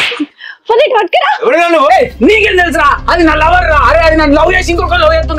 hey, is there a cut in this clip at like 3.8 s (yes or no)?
no